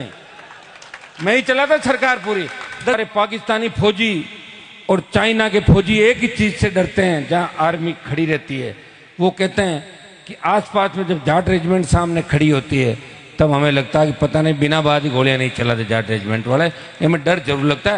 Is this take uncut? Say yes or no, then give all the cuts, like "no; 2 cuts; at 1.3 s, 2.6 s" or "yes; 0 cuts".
no; 1 cut; at 2.9 s